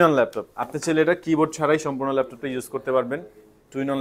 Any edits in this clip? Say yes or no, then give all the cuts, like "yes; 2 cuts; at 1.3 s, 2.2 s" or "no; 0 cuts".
no; 0 cuts